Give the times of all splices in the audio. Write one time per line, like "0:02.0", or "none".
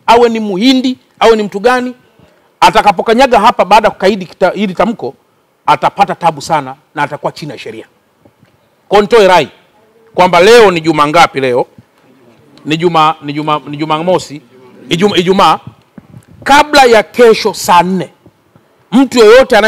none